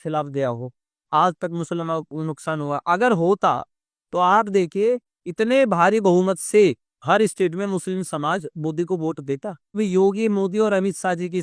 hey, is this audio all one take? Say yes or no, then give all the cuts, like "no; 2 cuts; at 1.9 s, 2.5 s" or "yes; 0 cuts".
no; 1 cut; at 9.8 s